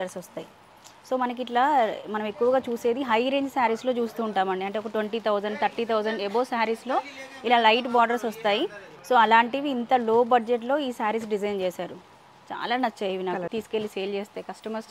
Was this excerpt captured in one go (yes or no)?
no